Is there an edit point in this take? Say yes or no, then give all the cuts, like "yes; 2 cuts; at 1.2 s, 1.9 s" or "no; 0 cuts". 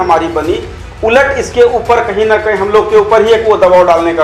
no; 0 cuts